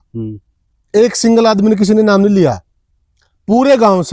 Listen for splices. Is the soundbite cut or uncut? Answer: uncut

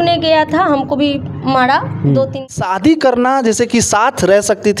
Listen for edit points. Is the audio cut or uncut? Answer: cut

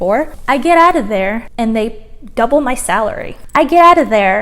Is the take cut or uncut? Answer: cut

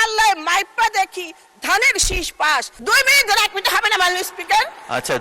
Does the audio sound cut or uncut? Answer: cut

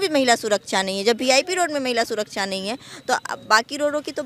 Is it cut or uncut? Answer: uncut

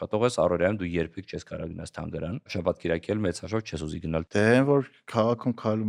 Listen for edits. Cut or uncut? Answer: cut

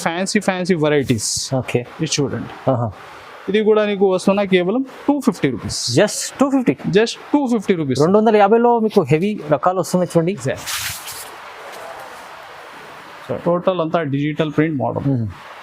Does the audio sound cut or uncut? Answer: cut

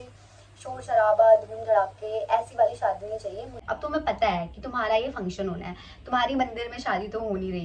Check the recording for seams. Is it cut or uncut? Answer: cut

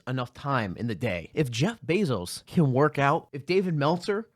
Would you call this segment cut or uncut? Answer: cut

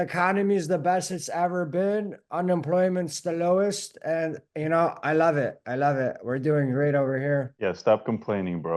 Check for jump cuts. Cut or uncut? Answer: cut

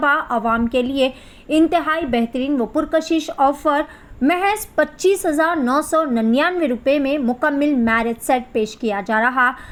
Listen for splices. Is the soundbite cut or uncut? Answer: uncut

